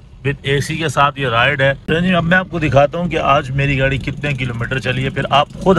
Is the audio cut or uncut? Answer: cut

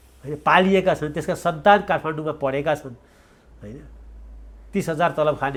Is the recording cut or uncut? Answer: uncut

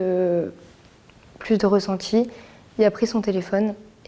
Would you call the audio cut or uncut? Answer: uncut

